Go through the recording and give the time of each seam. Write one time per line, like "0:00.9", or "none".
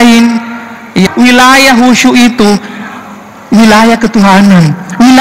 0:01.1